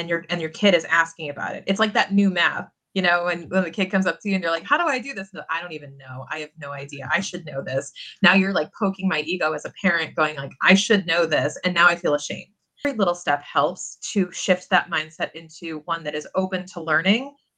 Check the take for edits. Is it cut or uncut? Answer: cut